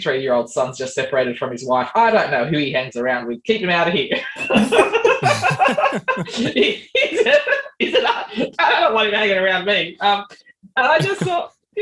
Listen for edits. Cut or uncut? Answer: uncut